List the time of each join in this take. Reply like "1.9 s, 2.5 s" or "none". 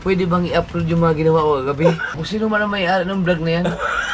2.1 s